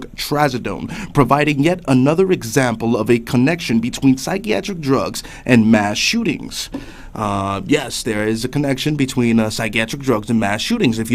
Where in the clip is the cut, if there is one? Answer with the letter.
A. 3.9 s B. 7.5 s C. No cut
A